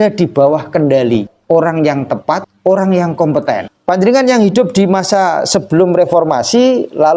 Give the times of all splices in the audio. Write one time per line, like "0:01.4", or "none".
0:01.3
0:02.5
0:03.7